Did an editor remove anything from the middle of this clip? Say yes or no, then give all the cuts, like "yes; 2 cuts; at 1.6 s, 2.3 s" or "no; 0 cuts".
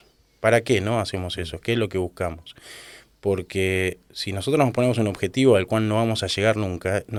no; 0 cuts